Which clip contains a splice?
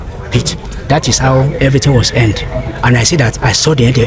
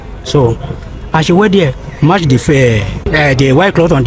second; 1 cut; at 3.0 s

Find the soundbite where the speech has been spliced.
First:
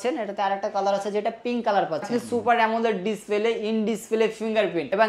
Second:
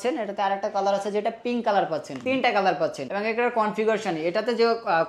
first; 1 cut; at 2.1 s

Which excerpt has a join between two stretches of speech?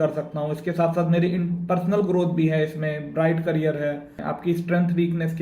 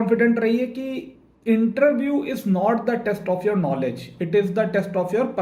first; 1 cut; at 4.2 s

